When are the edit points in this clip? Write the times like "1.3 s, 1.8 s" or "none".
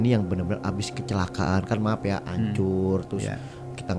none

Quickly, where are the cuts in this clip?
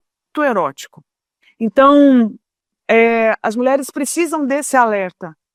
none

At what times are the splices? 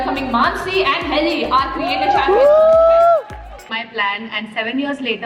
3.7 s

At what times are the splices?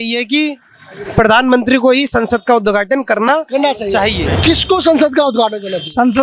none

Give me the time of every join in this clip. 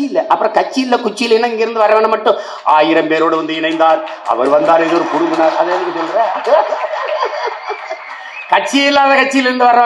none

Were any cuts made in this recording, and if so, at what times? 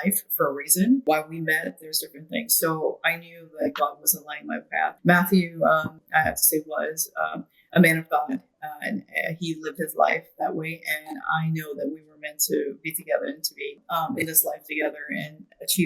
1.0 s, 5.0 s, 6.0 s, 13.8 s

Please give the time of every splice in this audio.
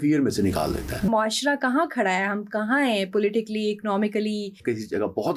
1.1 s, 4.6 s

